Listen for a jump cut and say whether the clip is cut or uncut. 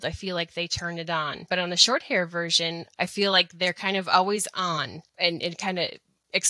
cut